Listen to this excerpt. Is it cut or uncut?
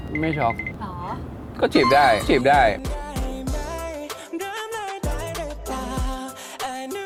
uncut